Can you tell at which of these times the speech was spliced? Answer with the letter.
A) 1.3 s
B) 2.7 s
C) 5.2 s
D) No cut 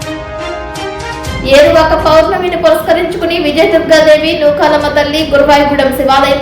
A